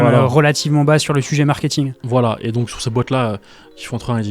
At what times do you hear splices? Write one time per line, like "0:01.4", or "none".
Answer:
none